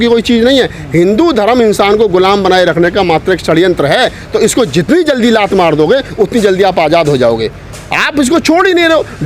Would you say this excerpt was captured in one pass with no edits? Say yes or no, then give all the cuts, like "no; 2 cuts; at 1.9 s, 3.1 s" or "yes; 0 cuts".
yes; 0 cuts